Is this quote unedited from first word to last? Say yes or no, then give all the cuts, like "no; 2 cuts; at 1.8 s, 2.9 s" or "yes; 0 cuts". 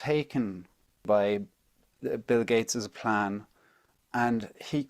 no; 1 cut; at 1.0 s